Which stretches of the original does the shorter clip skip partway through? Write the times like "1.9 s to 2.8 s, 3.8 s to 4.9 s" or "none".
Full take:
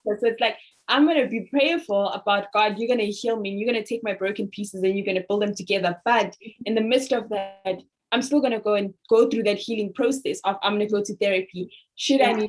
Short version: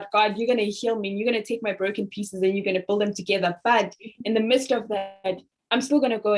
none